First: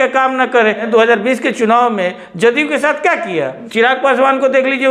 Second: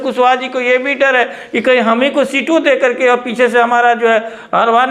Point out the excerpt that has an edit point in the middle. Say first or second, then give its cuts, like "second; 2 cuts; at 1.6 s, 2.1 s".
first; 2 cuts; at 0.9 s, 3.6 s